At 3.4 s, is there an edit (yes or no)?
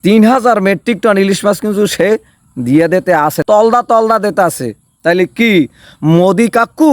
yes